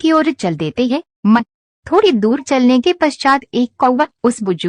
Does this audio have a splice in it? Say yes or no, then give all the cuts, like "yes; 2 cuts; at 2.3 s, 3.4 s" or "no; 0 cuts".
yes; 1 cut; at 3.7 s